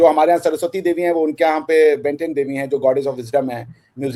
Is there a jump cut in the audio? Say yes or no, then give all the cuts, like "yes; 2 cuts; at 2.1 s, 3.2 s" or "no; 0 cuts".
no; 0 cuts